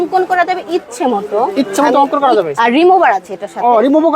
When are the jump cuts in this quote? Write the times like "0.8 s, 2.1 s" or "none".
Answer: 2.5 s

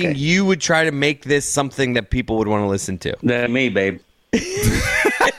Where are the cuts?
none

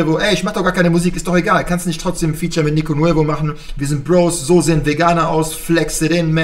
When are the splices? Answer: none

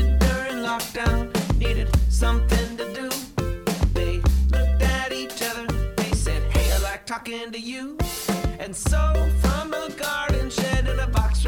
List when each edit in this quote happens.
none

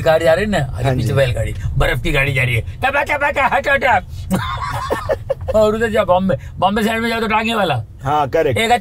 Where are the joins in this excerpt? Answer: 5.4 s

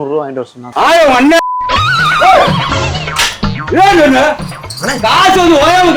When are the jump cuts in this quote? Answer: none

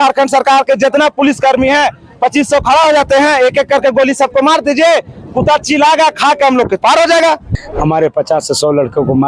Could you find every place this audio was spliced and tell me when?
7.5 s

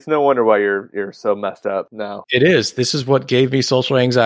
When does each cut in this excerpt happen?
2.2 s

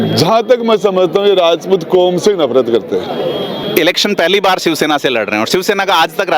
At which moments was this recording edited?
3.6 s

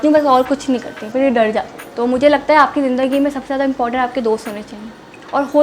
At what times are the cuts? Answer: 1.8 s

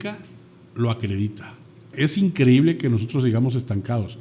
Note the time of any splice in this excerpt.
1.9 s

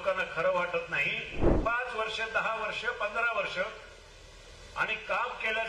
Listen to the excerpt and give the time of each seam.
1.4 s

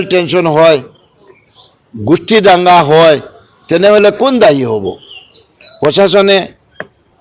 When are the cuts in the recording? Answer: none

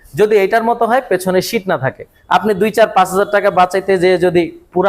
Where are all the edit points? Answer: 2.1 s

